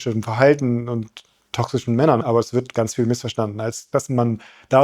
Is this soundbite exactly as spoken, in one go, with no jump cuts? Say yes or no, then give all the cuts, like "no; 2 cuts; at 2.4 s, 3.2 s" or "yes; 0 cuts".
no; 2 cuts; at 2.2 s, 3.8 s